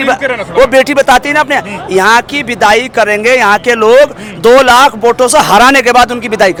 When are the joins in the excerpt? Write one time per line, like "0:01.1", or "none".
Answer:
none

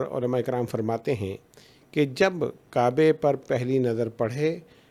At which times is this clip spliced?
none

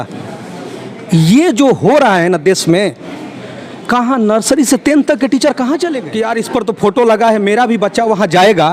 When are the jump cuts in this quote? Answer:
0:06.1

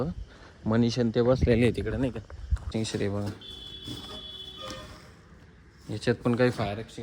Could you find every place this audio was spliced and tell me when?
0:02.7

